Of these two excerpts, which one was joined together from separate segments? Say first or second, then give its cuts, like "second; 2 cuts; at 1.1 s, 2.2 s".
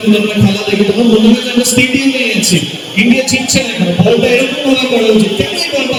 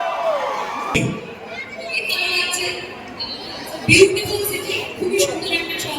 second; 1 cut; at 1.0 s